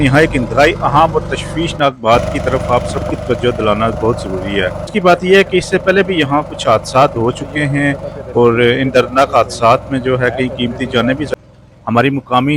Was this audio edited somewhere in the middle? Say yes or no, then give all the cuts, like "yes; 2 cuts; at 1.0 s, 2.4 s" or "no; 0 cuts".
yes; 2 cuts; at 4.9 s, 11.3 s